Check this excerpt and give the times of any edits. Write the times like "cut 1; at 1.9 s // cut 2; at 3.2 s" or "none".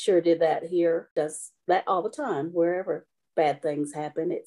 cut 1; at 1.1 s